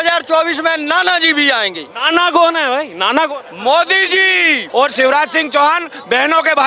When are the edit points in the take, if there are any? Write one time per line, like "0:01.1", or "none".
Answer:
0:04.6